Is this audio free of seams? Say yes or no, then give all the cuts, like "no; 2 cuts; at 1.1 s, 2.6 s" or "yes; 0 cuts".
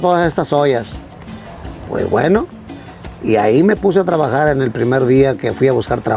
yes; 0 cuts